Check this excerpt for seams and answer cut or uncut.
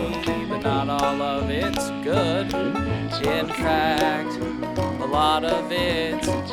uncut